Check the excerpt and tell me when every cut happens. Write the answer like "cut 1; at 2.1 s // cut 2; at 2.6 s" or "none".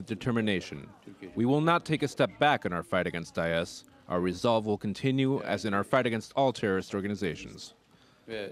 none